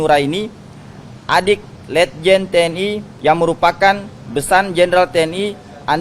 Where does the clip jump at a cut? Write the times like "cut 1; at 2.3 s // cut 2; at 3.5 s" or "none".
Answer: cut 1; at 3.1 s

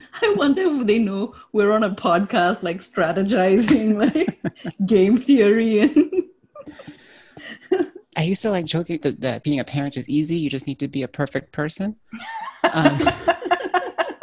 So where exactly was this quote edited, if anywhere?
cut 1; at 9.0 s

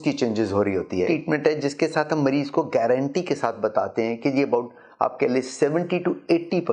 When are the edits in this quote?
cut 1; at 1.1 s

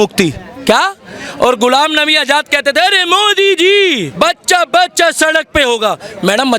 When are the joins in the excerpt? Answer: cut 1; at 4.1 s

